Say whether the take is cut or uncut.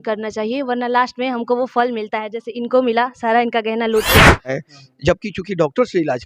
cut